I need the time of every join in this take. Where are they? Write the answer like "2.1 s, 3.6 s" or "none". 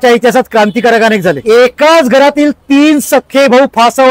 1.4 s